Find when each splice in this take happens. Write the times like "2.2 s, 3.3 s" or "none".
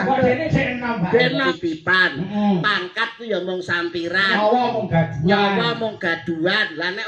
1.5 s

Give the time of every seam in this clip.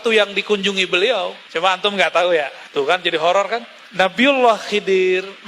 1.4 s, 2.6 s, 3.8 s

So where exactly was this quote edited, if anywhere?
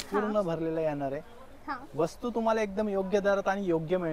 none

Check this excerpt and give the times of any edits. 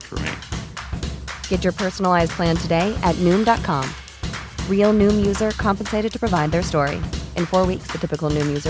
none

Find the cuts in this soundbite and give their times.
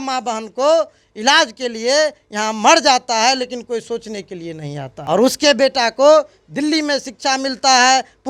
4.9 s

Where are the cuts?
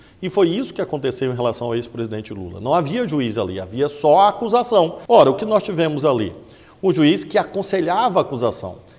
5.0 s

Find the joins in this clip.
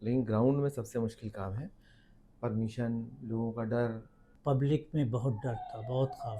4.3 s

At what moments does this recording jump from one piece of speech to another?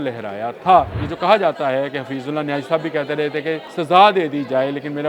1.0 s, 3.7 s

